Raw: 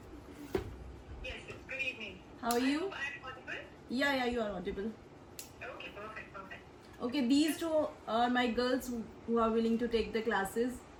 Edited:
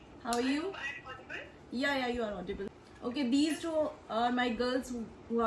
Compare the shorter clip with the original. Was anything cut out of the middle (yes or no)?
yes